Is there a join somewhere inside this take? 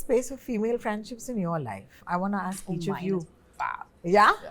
no; 0 cuts

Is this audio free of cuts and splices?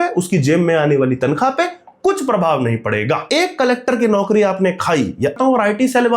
no; 2 cuts; at 3.2 s, 5.4 s

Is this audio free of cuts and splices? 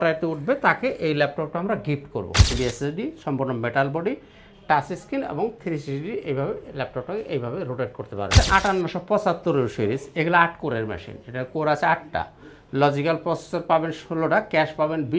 no; 2 cuts; at 2.5 s, 8.3 s

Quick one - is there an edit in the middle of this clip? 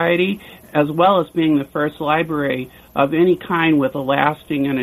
no; 0 cuts

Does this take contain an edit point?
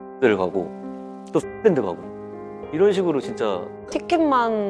yes; 1 cut; at 3.8 s

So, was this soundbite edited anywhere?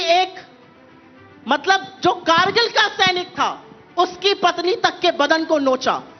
no; 0 cuts

